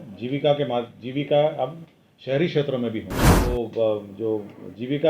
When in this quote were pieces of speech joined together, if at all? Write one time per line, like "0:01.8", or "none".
0:03.2